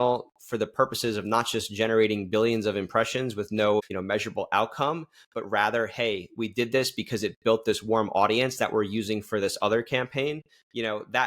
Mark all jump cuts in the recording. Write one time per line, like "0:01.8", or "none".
0:03.9